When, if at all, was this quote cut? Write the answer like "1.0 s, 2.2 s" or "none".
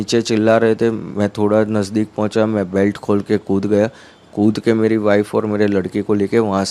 none